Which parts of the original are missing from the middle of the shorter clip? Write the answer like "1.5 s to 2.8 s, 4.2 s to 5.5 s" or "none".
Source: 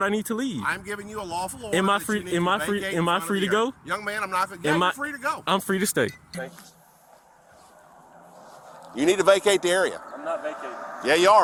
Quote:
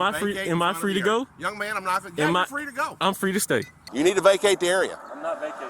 6.2 s to 8.8 s